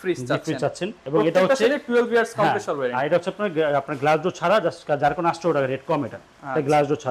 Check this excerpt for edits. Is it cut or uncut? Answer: cut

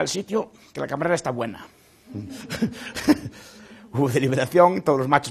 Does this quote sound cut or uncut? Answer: uncut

